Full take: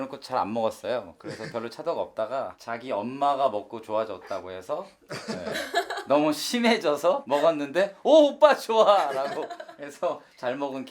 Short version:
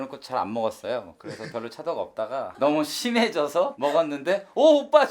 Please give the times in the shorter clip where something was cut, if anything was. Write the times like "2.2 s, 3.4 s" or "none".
2.5 s